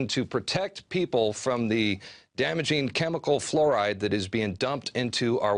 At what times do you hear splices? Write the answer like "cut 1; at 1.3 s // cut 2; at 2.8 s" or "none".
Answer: cut 1; at 1.5 s